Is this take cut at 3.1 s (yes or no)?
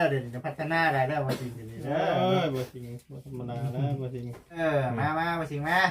no